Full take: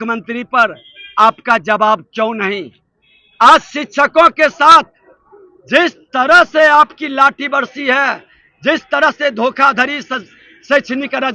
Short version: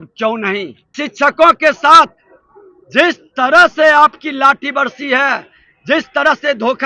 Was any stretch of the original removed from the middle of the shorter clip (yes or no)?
yes